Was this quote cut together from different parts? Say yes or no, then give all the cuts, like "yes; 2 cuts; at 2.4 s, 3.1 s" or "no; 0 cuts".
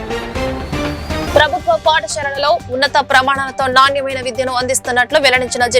no; 0 cuts